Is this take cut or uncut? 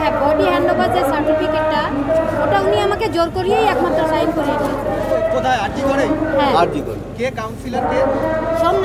uncut